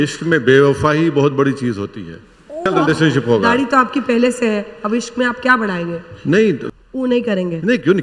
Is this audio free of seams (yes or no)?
no